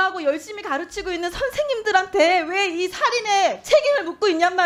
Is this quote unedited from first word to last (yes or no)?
yes